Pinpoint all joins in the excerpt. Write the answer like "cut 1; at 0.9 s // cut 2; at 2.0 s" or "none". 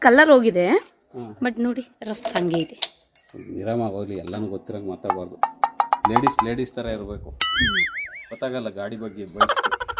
none